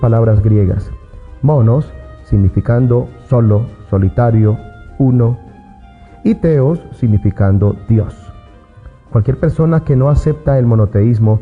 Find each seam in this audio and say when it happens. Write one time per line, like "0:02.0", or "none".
0:06.3